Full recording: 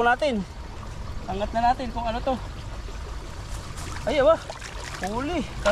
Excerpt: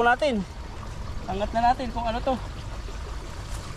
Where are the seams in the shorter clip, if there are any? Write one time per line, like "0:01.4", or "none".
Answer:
none